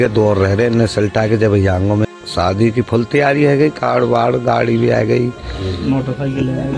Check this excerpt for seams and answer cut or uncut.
cut